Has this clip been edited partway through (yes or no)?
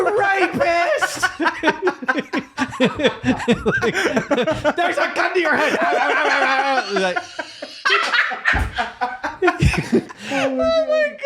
yes